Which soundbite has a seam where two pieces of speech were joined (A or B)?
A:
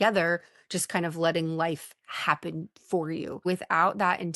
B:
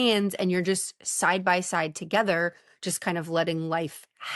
A